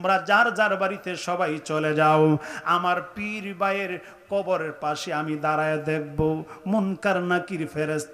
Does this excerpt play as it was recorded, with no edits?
yes; 0 cuts

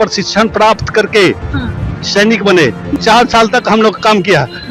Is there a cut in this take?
yes; 1 cut; at 2.9 s

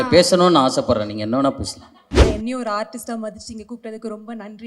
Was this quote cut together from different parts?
yes; 1 cut; at 2.2 s

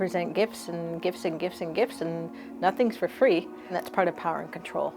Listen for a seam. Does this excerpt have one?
yes; 1 cut; at 3.6 s

